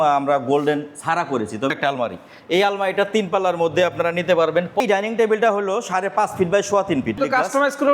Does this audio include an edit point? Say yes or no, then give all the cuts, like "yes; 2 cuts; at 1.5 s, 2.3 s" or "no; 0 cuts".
yes; 3 cuts; at 1.7 s, 4.8 s, 7.2 s